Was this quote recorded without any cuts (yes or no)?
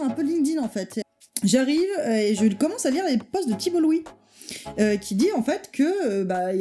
no